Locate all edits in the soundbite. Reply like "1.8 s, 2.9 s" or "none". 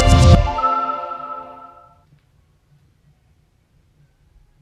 1.6 s